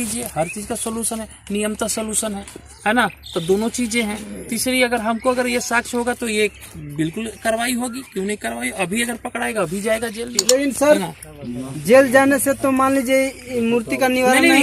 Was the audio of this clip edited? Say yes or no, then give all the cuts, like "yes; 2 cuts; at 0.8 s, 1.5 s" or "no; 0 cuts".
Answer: yes; 1 cut; at 10.3 s